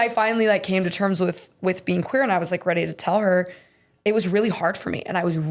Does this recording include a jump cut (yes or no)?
no